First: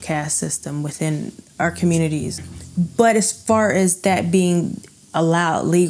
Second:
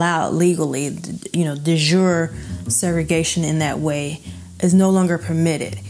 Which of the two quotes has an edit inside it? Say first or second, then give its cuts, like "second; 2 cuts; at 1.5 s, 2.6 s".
first; 1 cut; at 2.5 s